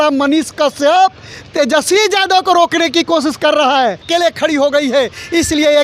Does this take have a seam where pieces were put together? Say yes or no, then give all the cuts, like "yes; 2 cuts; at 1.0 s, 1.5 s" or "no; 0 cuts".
yes; 1 cut; at 4.0 s